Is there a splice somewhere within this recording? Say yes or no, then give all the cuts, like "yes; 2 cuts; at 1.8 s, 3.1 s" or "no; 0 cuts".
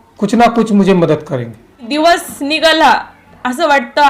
yes; 1 cut; at 1.8 s